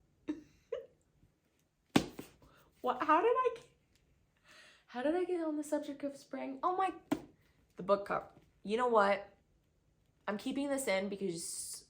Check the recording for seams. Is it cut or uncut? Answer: uncut